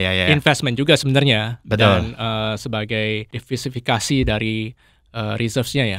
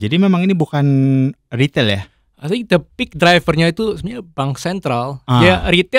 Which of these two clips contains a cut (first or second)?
first